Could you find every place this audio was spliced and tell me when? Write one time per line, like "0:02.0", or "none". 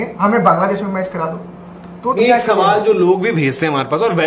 0:02.1